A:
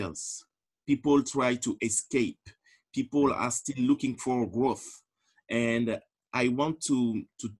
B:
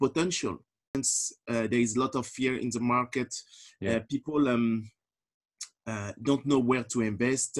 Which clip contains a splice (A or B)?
B